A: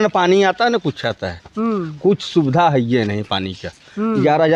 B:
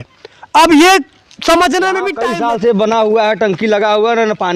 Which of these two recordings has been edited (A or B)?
B